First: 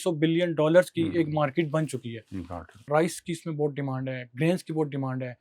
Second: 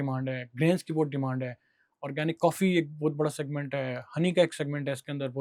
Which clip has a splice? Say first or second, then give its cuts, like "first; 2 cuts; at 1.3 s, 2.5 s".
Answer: first; 1 cut; at 2.7 s